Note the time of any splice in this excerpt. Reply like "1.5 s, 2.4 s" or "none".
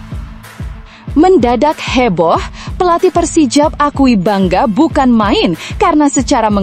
1.1 s